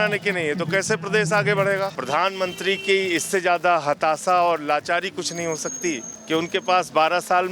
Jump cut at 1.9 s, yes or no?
yes